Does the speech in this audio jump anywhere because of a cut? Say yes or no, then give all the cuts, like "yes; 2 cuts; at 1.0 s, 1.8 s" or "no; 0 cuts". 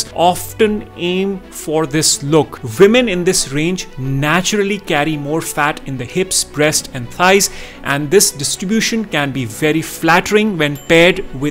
yes; 1 cut; at 2.6 s